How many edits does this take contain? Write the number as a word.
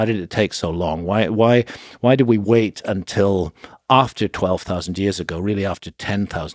zero